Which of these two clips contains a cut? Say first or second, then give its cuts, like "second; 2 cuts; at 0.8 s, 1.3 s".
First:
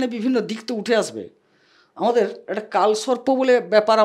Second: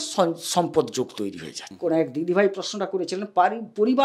second; 1 cut; at 1.7 s